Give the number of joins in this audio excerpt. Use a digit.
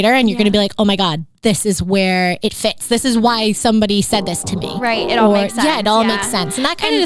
0